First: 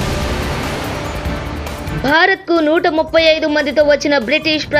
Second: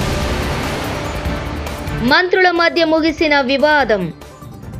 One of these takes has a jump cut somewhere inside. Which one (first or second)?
second